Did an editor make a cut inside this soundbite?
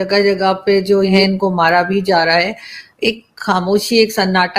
yes; 1 cut; at 1.2 s

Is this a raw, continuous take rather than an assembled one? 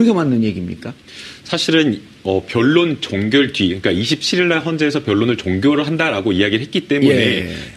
no; 1 cut; at 5.9 s

